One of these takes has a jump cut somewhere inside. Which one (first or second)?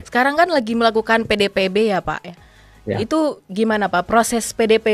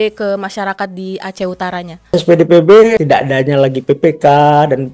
second